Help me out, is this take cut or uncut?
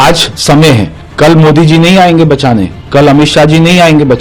cut